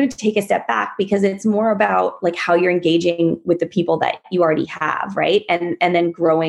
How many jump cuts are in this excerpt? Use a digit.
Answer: 0